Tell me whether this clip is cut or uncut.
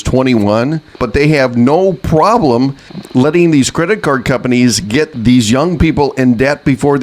cut